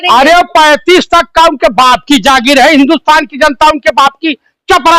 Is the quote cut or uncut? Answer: uncut